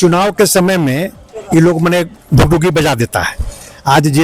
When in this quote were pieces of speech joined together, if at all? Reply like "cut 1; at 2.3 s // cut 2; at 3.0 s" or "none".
none